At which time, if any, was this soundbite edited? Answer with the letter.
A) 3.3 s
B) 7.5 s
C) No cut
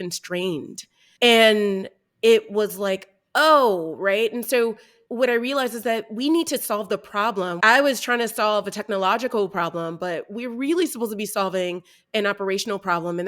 B